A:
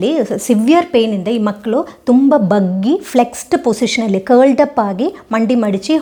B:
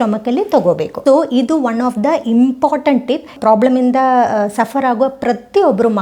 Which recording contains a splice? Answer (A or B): B